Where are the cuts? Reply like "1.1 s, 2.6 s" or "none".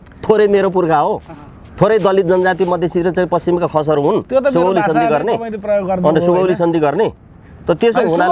none